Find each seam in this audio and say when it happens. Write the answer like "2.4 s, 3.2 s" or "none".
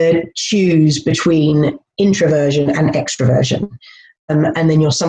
none